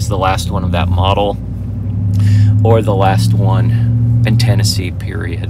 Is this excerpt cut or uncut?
uncut